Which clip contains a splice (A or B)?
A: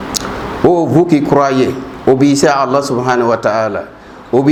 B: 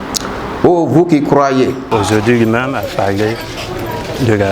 B